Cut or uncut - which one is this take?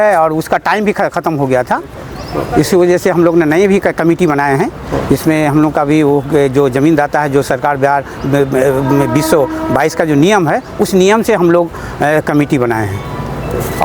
uncut